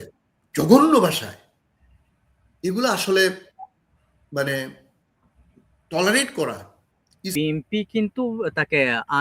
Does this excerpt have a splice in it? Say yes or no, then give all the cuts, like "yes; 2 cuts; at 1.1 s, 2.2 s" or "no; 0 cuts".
yes; 1 cut; at 7.3 s